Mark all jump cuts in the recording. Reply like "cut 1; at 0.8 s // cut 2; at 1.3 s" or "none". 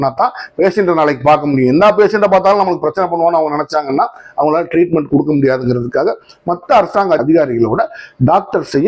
none